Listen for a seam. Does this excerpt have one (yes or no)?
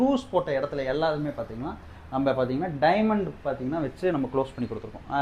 no